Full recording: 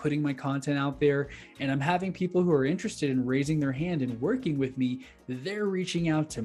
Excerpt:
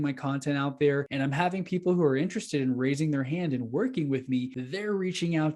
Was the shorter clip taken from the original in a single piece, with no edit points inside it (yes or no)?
no